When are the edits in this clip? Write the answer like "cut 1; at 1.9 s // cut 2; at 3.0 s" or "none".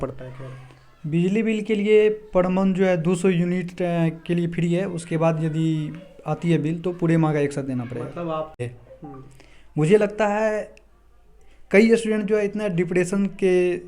cut 1; at 8.6 s